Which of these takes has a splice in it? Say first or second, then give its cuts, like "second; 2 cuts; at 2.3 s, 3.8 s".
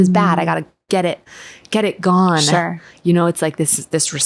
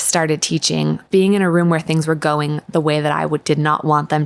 second; 1 cut; at 1.1 s